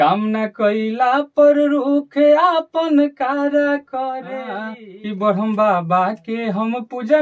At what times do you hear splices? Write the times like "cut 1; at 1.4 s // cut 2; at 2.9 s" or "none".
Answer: cut 1; at 4.7 s